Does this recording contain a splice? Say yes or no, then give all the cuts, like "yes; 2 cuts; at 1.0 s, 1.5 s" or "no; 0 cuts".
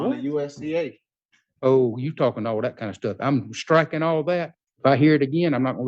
yes; 1 cut; at 4.6 s